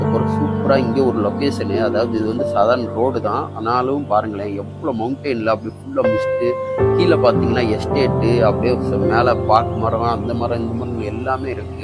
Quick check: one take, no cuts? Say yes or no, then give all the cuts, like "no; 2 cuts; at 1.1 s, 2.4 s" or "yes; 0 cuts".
yes; 0 cuts